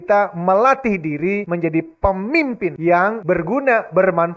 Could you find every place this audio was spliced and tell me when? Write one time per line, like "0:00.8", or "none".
0:01.5
0:03.1